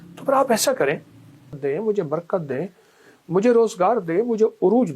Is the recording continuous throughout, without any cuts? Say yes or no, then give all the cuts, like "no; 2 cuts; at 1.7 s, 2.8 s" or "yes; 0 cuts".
no; 1 cut; at 1.6 s